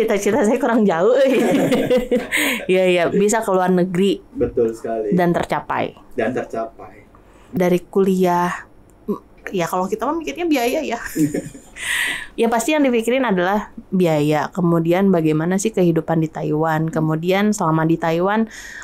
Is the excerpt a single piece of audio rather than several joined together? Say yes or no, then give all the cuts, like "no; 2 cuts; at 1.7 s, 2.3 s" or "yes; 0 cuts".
no; 1 cut; at 7.4 s